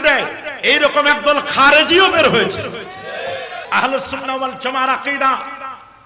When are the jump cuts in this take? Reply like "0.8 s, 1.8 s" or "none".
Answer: 3.6 s